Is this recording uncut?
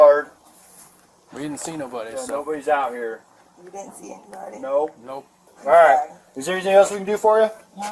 no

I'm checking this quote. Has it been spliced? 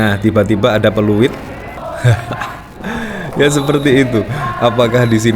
yes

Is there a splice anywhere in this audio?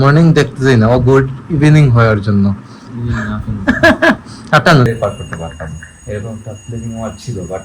yes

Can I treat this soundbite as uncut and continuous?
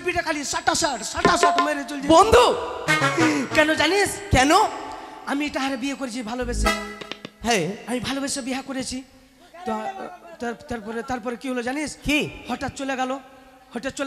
yes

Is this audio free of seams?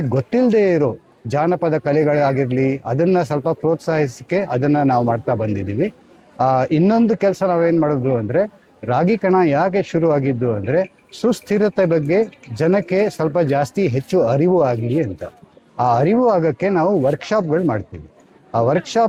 yes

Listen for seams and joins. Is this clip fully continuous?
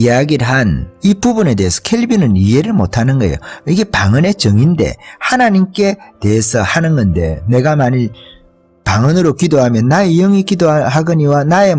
yes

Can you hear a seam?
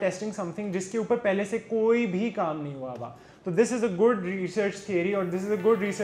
no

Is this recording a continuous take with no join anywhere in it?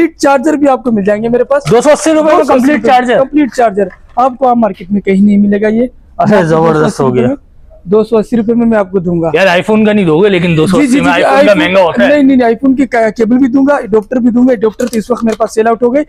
yes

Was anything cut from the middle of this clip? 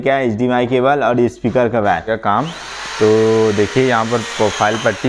yes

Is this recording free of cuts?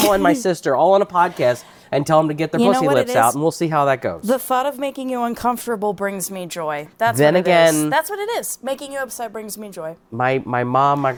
yes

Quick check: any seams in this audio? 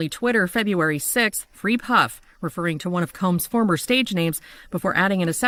no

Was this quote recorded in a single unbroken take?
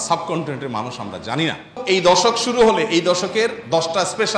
no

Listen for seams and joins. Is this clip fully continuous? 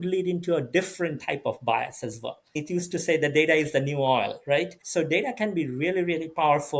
no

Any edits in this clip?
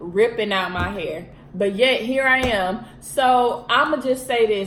no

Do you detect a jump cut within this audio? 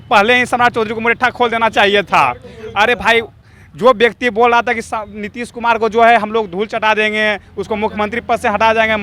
no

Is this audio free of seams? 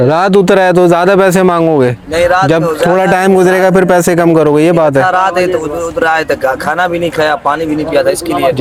yes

